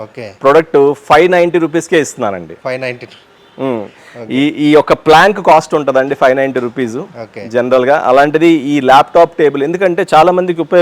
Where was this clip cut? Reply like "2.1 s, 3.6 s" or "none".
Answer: none